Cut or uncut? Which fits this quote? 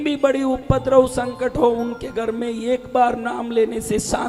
uncut